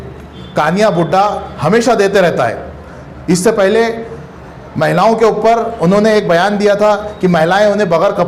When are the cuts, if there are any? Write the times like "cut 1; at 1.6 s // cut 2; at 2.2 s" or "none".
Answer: none